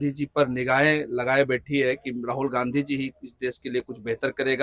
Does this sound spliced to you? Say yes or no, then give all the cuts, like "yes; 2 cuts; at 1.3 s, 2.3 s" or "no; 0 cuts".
no; 0 cuts